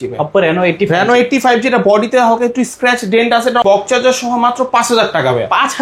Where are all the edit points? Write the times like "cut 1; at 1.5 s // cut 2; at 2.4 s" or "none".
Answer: cut 1; at 3.6 s